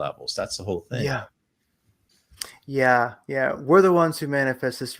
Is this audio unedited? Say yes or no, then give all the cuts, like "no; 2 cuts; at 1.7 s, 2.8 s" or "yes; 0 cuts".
no; 1 cut; at 2.0 s